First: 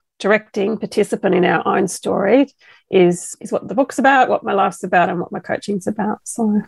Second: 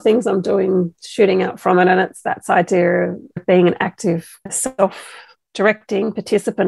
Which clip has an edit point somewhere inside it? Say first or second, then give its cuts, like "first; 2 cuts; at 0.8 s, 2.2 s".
second; 2 cuts; at 3.4 s, 4.4 s